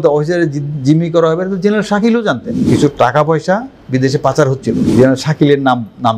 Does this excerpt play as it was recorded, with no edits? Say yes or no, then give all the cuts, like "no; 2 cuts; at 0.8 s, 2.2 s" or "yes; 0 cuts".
no; 2 cuts; at 2.6 s, 4.8 s